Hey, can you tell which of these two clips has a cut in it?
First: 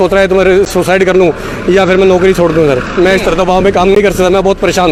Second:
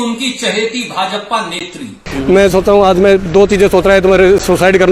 second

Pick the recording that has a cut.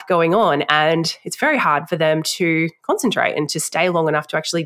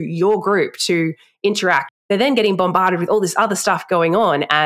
second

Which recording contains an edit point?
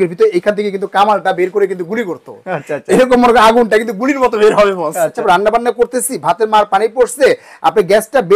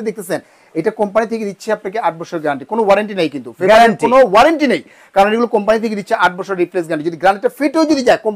first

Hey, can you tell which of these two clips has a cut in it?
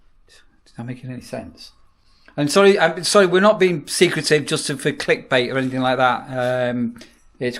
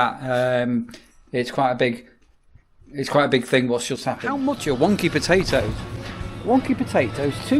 second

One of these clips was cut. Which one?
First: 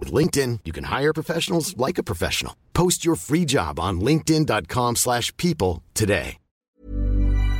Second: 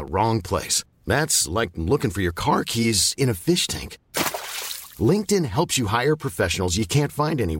first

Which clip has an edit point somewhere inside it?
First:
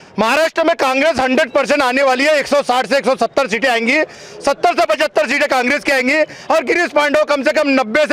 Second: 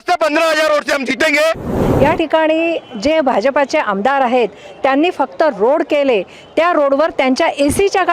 second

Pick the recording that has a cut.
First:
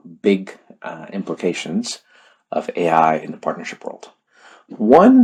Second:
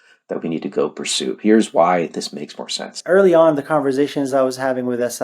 second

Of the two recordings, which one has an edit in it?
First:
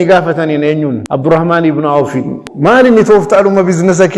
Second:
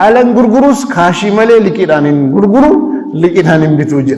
first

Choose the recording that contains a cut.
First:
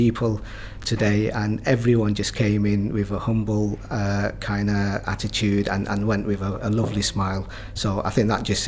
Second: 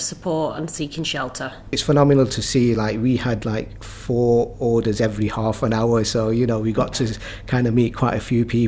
second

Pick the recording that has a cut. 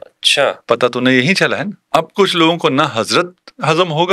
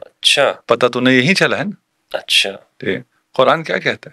first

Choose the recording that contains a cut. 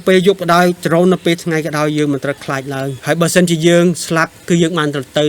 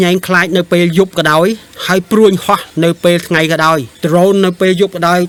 first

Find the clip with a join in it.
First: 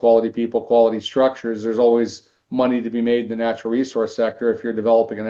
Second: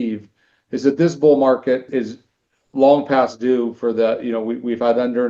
second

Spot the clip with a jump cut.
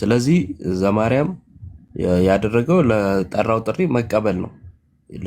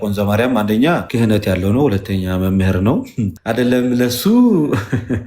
second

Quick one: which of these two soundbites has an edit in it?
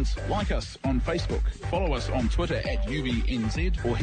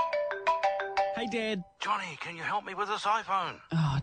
second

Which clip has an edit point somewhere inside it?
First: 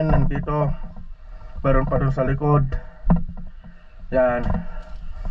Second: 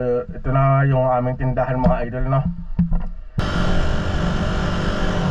second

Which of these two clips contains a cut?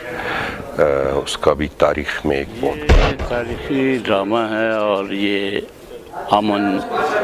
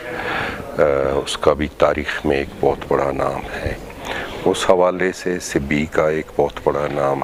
first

